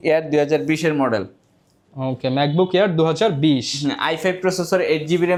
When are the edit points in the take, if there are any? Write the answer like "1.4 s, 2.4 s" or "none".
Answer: none

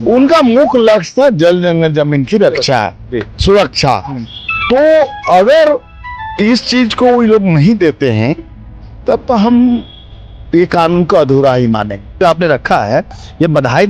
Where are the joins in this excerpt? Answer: 12.2 s

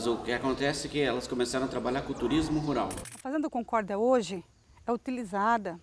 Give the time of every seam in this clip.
3.1 s

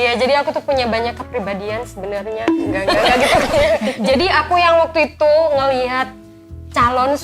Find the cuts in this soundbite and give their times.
3.9 s

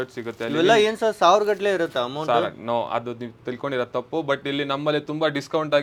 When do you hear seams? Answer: none

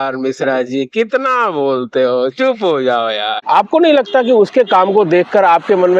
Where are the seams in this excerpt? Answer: 3.3 s

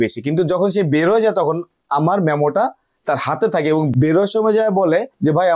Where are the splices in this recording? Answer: 3.9 s

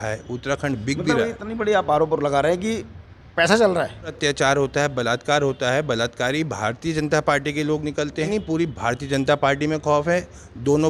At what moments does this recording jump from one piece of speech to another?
4.2 s, 8.3 s

